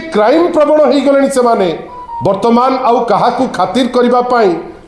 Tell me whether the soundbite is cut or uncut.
uncut